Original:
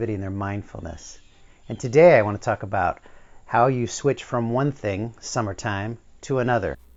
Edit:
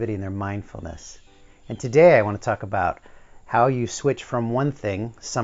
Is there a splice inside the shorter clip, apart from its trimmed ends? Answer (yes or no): no